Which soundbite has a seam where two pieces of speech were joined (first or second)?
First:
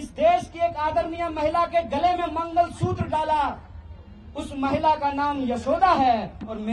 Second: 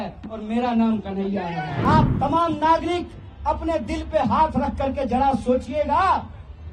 second